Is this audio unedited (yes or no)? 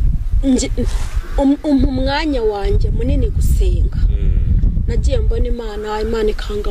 yes